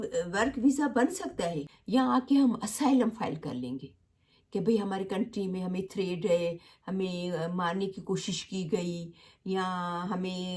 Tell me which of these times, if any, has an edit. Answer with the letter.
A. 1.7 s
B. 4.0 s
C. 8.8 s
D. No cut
A